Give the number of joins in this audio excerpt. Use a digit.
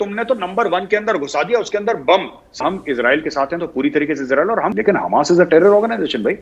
2